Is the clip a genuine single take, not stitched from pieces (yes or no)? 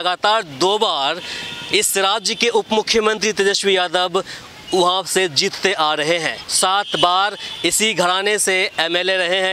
no